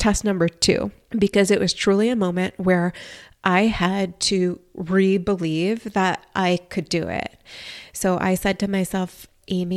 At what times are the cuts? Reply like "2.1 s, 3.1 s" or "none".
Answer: 1.0 s